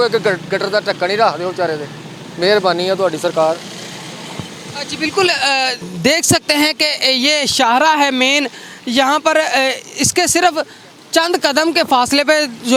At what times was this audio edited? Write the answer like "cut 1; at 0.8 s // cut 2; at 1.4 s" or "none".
none

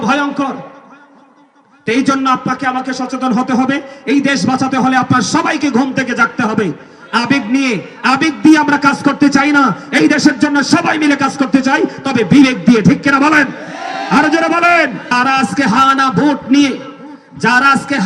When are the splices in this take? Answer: cut 1; at 15.1 s

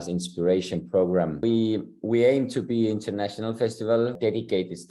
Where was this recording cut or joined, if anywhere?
cut 1; at 1.4 s // cut 2; at 4.1 s

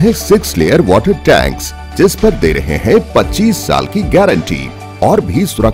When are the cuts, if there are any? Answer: none

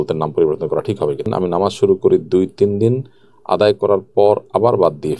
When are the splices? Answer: cut 1; at 1.2 s

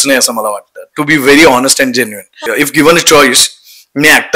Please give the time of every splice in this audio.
cut 1; at 2.4 s

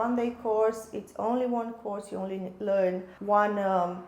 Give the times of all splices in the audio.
cut 1; at 3.1 s

